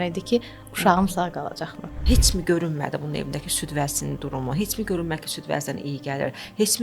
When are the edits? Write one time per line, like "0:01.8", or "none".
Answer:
0:02.0